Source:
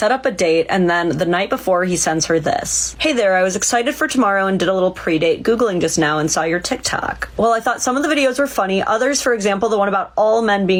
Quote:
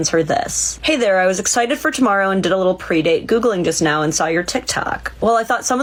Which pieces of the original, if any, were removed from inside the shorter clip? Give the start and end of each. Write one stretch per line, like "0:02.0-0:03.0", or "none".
none